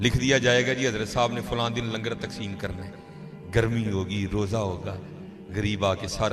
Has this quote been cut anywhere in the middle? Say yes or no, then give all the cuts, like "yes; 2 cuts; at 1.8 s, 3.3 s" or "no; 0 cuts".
no; 0 cuts